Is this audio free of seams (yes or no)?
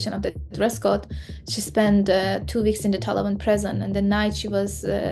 yes